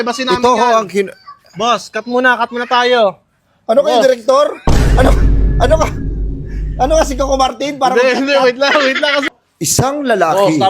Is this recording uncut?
no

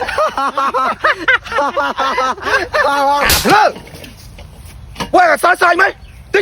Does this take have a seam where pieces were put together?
no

